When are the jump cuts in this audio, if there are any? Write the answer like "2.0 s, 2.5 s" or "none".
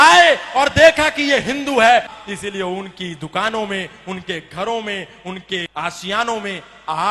2.1 s, 5.7 s